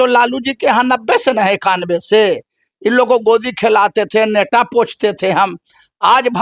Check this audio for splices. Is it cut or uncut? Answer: uncut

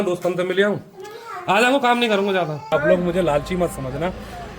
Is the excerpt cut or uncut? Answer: cut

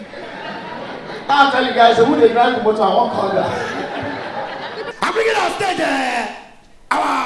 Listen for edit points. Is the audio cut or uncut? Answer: cut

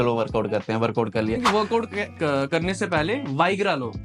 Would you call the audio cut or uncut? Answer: cut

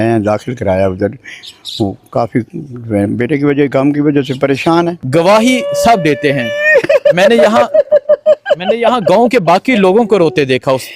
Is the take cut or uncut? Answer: cut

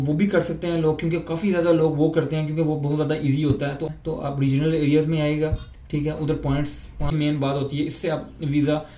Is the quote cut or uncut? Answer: cut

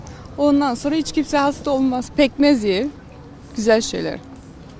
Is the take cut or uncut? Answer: uncut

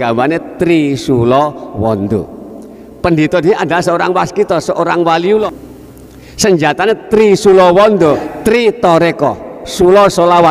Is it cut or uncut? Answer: cut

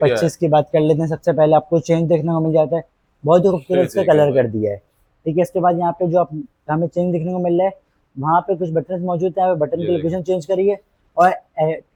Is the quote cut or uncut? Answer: uncut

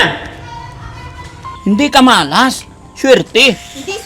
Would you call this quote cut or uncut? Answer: cut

